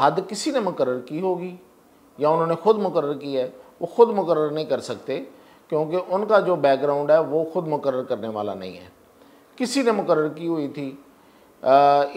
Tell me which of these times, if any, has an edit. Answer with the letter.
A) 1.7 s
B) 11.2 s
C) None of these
C